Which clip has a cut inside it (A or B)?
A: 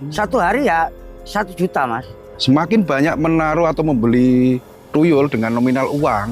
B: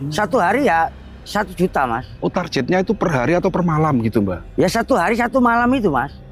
A